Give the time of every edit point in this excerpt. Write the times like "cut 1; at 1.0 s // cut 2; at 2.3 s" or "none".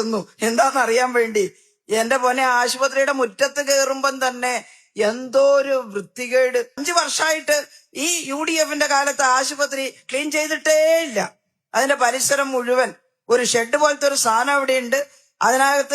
cut 1; at 6.8 s